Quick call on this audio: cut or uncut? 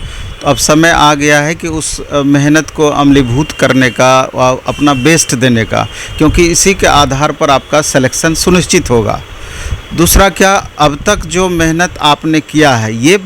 uncut